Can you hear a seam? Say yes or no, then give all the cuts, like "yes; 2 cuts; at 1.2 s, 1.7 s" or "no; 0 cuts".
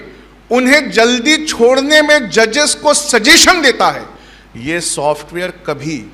no; 0 cuts